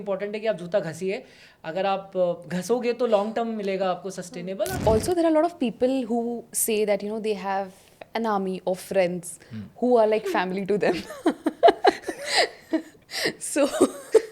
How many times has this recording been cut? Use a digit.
1